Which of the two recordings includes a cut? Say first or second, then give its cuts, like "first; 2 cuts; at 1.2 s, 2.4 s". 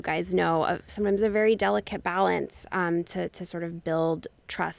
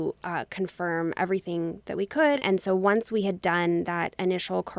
second; 1 cut; at 2.4 s